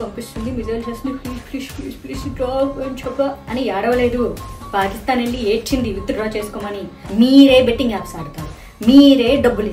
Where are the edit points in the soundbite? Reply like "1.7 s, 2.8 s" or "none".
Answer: 6.9 s